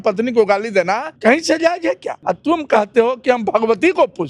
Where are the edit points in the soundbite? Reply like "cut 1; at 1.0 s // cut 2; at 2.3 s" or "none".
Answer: cut 1; at 1.1 s // cut 2; at 2.1 s